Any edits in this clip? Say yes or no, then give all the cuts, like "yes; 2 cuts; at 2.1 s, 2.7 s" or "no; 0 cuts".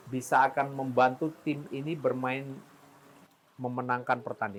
no; 0 cuts